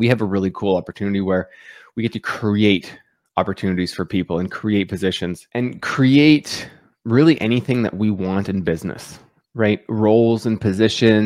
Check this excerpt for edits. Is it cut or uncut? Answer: uncut